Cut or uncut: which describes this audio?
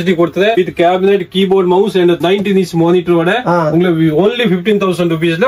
uncut